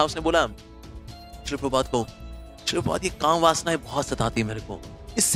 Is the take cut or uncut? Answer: uncut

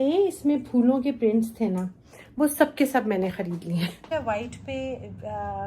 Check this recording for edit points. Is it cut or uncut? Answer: cut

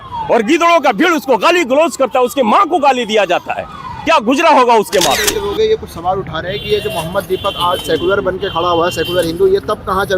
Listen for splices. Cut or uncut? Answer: cut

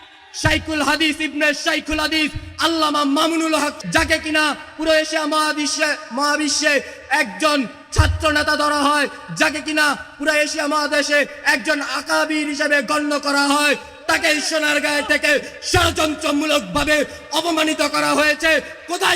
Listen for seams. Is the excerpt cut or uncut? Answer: cut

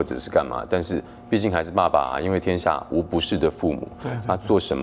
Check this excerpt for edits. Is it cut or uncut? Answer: uncut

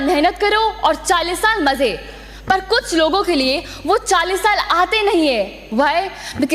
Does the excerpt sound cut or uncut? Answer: uncut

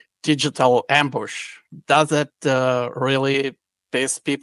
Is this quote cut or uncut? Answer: uncut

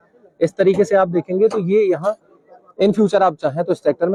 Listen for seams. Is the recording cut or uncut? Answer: uncut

